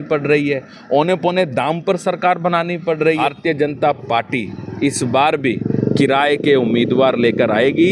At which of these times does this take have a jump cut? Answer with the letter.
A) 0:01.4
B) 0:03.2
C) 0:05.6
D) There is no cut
B